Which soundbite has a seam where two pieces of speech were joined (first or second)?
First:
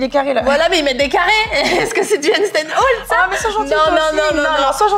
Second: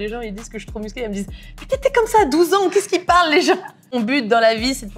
second